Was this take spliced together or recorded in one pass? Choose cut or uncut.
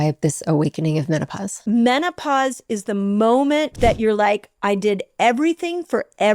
cut